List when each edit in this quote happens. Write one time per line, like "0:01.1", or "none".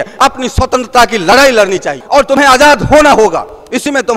0:01.9